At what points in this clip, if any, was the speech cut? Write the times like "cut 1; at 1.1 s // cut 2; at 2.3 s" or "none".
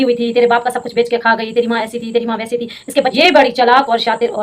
cut 1; at 3.1 s